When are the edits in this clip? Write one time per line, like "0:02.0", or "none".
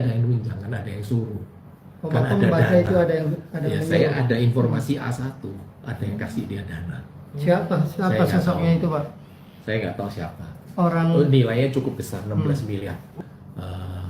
0:13.1